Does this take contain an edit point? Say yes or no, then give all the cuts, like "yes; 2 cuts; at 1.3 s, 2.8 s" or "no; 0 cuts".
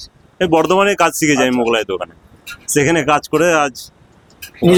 no; 0 cuts